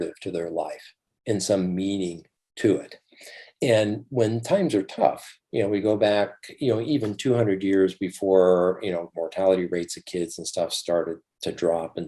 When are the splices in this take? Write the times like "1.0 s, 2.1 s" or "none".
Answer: none